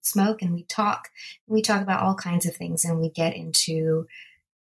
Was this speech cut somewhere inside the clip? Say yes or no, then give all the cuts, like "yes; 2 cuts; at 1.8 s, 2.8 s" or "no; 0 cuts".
no; 0 cuts